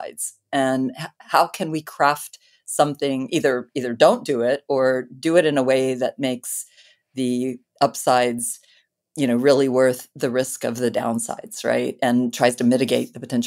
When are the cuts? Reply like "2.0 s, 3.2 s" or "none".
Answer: none